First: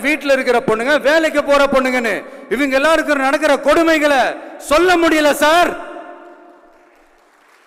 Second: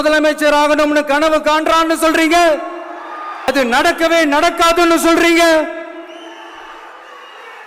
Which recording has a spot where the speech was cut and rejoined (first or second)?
second